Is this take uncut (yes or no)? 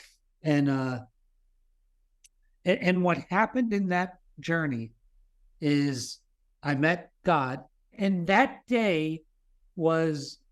no